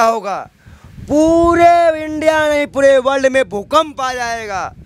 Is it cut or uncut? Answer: uncut